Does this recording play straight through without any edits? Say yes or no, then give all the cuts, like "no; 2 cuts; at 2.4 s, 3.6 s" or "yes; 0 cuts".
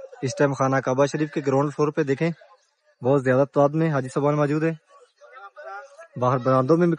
yes; 0 cuts